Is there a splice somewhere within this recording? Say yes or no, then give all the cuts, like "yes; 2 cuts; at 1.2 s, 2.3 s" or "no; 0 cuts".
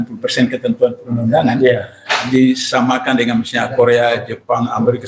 no; 0 cuts